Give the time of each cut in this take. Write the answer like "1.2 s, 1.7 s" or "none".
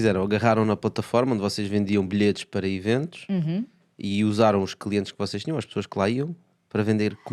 none